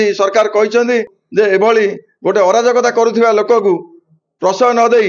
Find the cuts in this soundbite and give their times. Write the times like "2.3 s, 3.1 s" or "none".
1.2 s